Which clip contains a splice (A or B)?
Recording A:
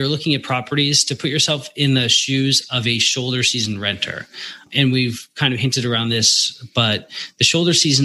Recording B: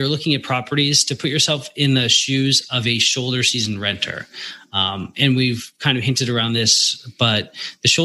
A